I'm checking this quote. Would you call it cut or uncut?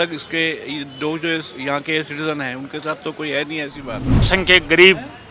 cut